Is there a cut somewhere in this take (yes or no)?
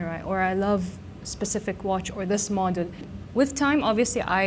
yes